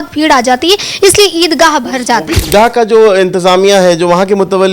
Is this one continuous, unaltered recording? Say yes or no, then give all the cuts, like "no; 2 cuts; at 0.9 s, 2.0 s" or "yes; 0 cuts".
no; 1 cut; at 2.4 s